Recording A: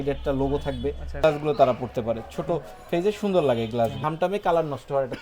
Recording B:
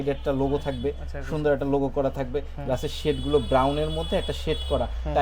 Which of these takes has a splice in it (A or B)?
A